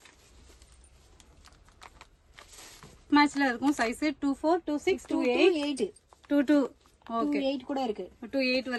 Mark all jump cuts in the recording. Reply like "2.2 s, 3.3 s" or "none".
none